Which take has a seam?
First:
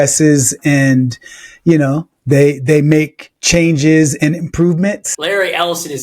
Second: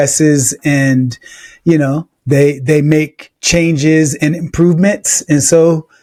first; 1 cut; at 5.1 s

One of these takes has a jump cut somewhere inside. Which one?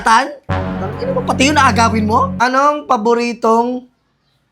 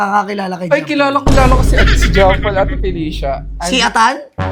first; 1 cut; at 2.3 s

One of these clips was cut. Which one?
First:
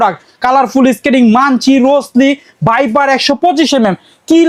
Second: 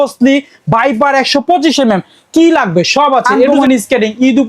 second; 1 cut; at 3.5 s

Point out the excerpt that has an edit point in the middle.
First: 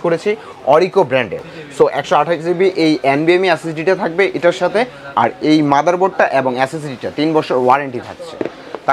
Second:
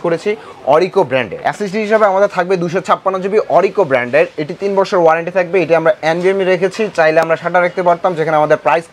second; 1 cut; at 1.3 s

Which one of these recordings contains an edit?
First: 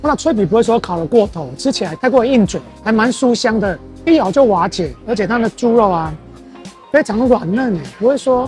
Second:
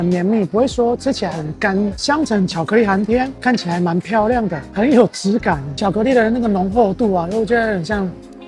second; 2 cuts; at 2.0 s, 5.7 s

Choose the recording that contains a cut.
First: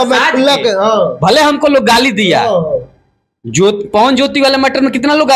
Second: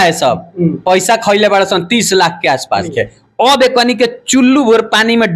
second; 1 cut; at 2.9 s

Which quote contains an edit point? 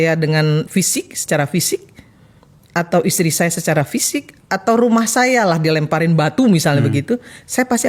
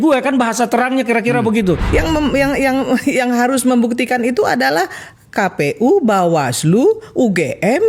second; 1 cut; at 1.8 s

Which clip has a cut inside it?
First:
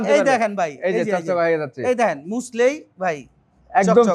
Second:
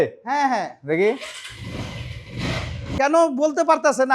second; 1 cut; at 3.0 s

